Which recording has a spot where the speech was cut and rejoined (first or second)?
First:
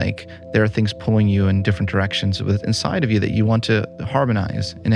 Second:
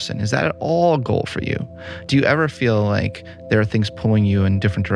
second